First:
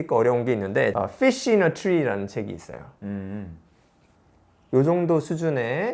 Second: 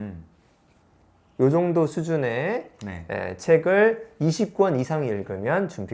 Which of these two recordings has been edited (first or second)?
first